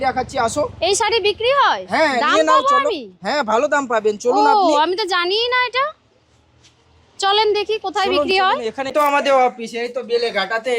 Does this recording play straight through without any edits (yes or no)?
no